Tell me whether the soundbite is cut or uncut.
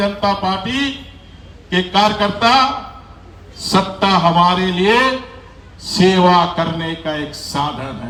uncut